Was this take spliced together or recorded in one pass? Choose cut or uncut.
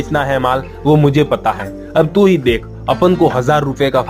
uncut